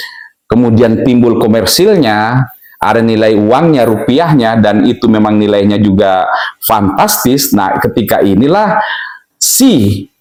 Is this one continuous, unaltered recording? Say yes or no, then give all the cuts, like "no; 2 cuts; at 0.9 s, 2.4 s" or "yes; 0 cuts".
yes; 0 cuts